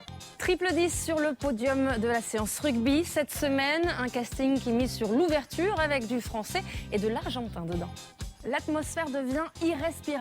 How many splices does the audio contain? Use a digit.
1